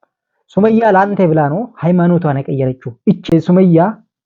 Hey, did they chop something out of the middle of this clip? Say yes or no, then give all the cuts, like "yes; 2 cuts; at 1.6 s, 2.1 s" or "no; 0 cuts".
no; 0 cuts